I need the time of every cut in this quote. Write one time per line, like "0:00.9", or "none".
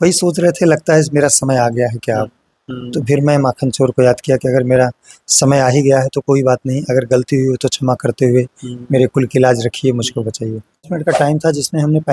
0:10.9